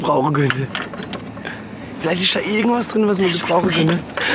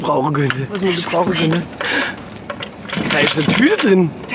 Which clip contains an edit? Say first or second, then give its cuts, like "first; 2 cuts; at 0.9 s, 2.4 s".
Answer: second; 2 cuts; at 0.8 s, 2.9 s